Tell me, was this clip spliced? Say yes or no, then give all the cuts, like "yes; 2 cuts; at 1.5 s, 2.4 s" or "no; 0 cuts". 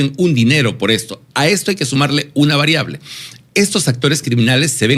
no; 0 cuts